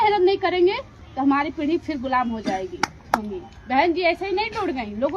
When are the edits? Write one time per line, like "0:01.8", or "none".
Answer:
0:03.3